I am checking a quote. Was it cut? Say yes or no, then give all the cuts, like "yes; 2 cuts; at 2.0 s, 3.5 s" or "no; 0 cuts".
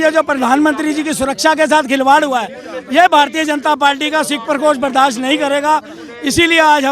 no; 0 cuts